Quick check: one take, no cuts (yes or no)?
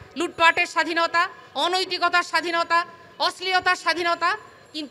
yes